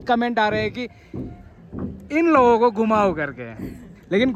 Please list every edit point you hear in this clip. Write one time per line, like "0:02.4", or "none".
none